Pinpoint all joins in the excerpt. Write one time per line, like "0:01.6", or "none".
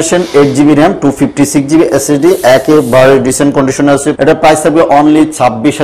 0:04.1